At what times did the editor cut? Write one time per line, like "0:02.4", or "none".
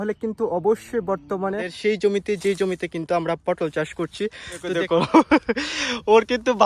0:01.7
0:04.7